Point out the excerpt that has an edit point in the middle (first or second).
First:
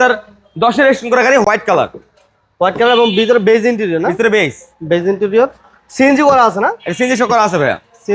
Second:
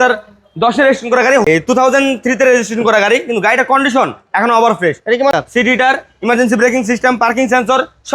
second